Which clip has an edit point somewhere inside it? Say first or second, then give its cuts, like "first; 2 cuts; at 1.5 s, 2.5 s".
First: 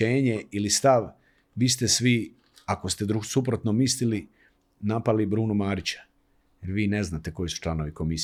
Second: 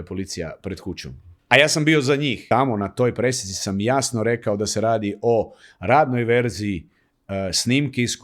second; 1 cut; at 2.4 s